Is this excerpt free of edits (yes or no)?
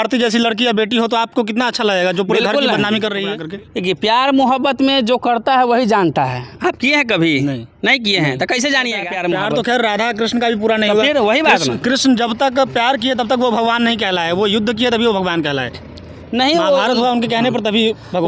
no